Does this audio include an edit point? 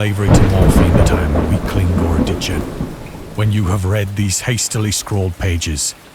yes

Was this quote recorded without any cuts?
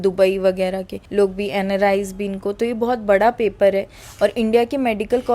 yes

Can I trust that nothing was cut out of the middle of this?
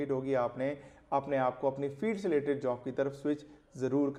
yes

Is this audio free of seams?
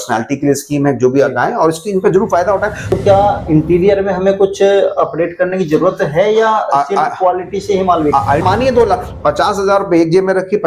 no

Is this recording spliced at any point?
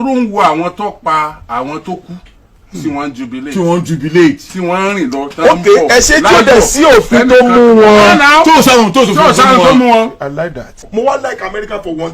yes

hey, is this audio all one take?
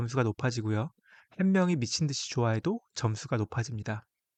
yes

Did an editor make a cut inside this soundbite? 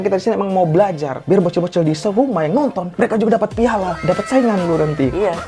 no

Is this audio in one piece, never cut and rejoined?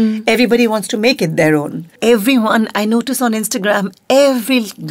no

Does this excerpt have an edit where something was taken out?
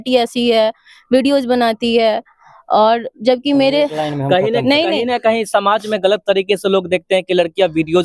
no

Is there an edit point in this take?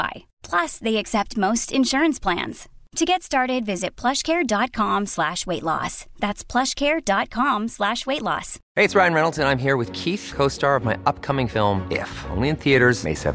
yes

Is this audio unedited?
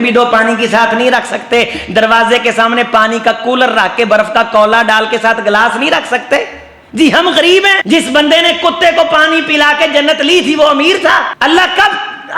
no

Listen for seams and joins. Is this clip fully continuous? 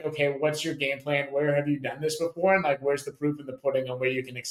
yes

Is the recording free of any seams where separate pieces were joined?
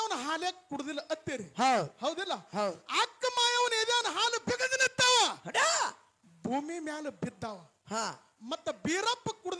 yes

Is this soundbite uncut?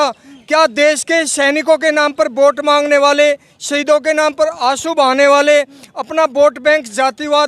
yes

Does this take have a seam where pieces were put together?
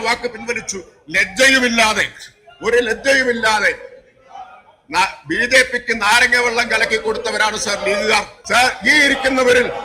yes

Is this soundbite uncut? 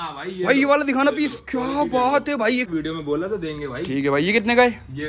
no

